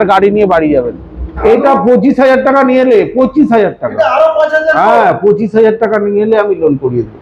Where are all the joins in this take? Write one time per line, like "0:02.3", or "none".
0:01.3